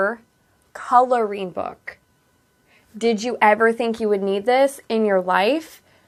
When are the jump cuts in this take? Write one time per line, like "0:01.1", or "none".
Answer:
none